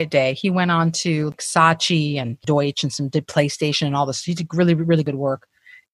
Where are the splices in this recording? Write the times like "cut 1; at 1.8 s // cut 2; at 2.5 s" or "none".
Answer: cut 1; at 1.3 s // cut 2; at 2.4 s // cut 3; at 5.0 s